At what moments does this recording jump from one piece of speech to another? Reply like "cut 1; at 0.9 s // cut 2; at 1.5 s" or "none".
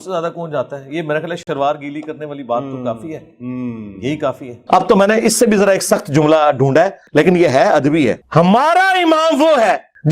cut 1; at 1.4 s // cut 2; at 4.6 s // cut 3; at 7.1 s

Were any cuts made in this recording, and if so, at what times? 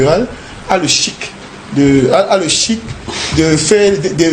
none

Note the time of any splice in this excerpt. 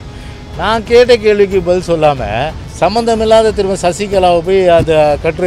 cut 1; at 2.6 s

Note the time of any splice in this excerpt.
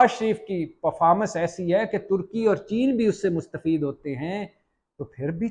none

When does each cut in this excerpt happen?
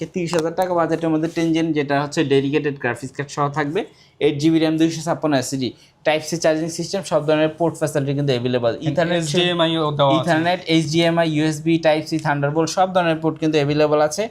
none

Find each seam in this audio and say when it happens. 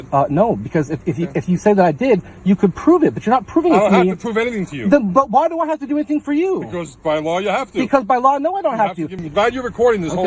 cut 1; at 9.2 s

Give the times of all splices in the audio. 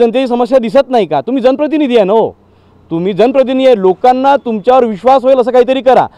none

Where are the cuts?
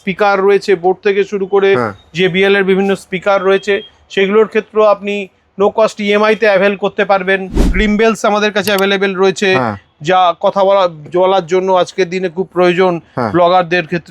cut 1; at 7.7 s

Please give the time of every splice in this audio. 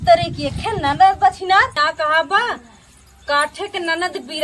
cut 1; at 1.8 s

